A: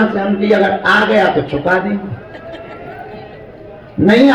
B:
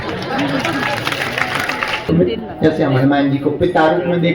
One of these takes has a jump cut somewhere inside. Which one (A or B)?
B